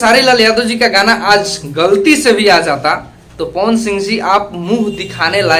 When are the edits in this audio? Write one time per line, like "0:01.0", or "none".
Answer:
none